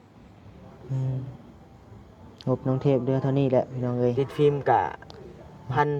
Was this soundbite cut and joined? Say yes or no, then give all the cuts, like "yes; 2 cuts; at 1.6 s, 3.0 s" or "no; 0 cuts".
yes; 1 cut; at 4.1 s